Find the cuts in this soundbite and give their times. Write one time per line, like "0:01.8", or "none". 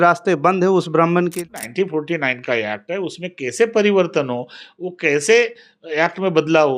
0:01.4